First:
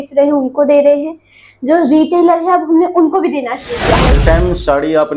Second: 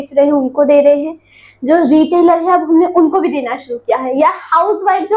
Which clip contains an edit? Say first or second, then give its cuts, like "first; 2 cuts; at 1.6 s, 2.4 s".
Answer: first; 1 cut; at 4.1 s